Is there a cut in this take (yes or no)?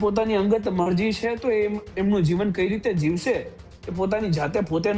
no